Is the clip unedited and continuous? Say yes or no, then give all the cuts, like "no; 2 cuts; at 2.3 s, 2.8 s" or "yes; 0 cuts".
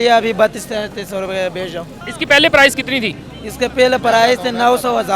no; 1 cut; at 2.0 s